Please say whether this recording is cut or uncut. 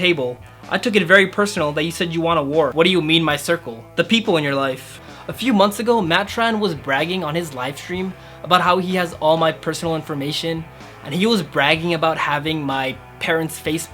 cut